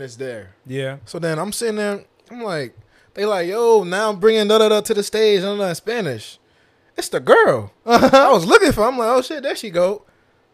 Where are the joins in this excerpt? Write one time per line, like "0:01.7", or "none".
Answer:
0:01.0